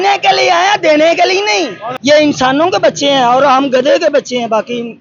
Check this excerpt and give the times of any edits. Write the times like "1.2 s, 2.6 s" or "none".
1.8 s